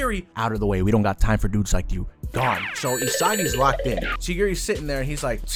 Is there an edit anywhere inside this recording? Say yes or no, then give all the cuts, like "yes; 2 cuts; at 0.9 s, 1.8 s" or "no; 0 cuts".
no; 0 cuts